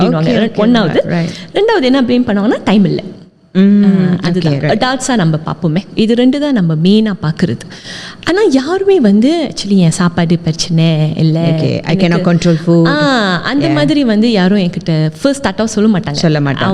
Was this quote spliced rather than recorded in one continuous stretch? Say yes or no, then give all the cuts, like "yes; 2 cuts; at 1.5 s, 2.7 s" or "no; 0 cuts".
no; 0 cuts